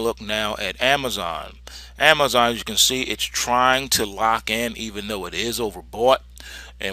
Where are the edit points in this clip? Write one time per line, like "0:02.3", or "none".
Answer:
0:01.0